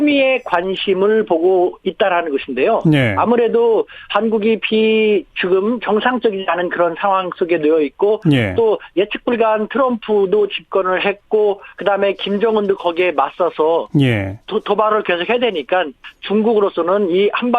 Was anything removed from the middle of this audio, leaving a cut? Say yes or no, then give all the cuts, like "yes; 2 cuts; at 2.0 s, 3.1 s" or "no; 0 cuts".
yes; 1 cut; at 9.9 s